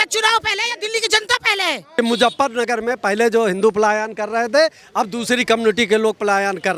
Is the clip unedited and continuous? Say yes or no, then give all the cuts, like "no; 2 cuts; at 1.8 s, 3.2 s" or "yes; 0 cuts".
no; 1 cut; at 1.9 s